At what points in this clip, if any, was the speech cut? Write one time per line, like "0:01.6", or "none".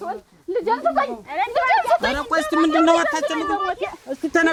none